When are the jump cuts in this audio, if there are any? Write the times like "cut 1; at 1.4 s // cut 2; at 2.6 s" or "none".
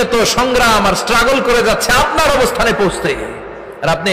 none